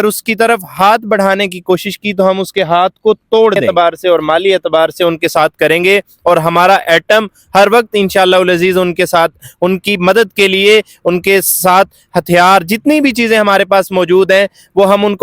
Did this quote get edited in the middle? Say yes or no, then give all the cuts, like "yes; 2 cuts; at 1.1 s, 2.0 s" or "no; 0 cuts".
yes; 1 cut; at 3.6 s